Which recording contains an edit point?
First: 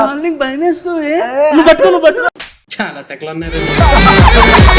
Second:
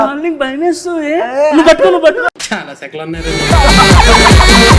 second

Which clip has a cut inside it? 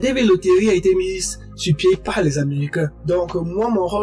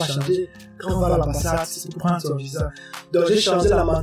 first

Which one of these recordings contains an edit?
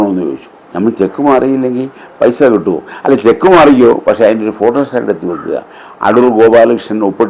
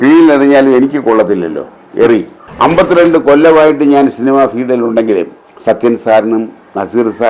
second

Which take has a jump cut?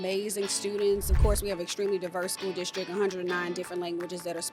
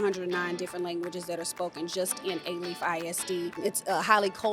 second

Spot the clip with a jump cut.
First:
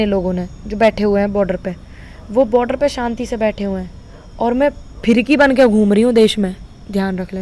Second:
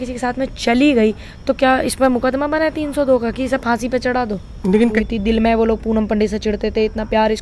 second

